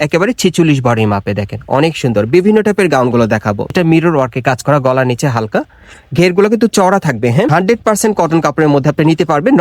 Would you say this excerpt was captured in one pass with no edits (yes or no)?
no